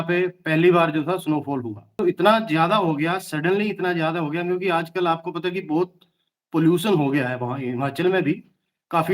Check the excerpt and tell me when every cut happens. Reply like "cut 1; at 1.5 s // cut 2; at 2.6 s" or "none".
cut 1; at 2.0 s

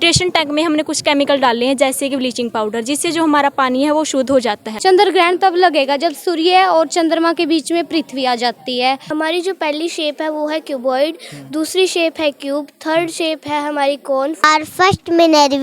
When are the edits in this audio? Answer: cut 1; at 4.7 s // cut 2; at 9.0 s // cut 3; at 14.4 s

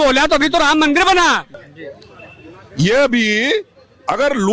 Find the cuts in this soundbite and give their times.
cut 1; at 1.5 s

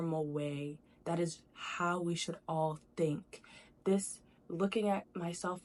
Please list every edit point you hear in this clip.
none

